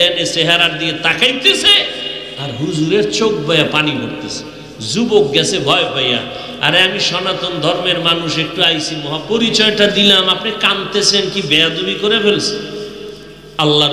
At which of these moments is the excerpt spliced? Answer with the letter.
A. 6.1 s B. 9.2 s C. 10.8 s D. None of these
B